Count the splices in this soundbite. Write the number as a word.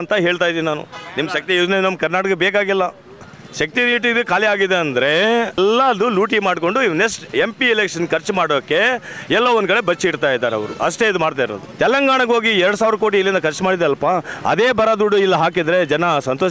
three